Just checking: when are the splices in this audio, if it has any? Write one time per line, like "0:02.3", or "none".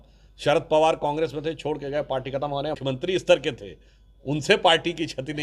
0:02.8